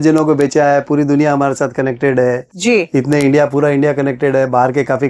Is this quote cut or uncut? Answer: uncut